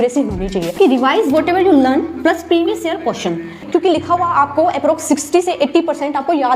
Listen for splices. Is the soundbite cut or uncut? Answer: cut